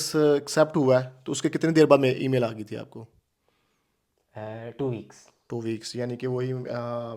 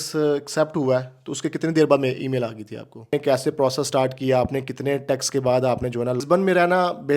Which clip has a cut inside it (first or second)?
second